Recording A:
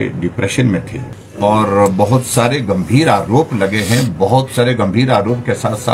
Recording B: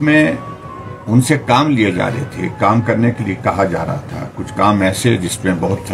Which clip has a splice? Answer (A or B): A